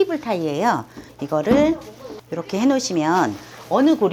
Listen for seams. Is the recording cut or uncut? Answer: uncut